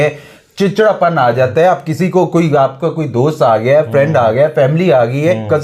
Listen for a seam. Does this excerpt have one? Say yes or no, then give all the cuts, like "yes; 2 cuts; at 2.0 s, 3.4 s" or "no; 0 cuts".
no; 0 cuts